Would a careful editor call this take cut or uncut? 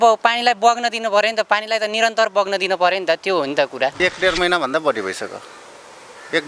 cut